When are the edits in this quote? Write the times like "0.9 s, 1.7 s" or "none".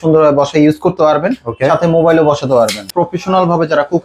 2.8 s